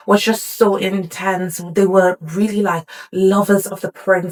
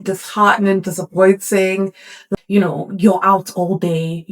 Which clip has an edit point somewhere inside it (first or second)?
second